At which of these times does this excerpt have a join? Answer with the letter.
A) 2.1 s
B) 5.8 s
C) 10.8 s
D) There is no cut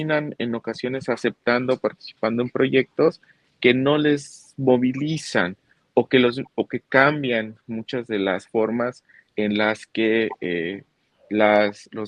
D